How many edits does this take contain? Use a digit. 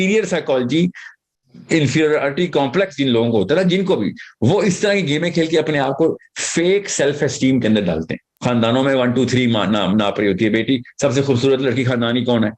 1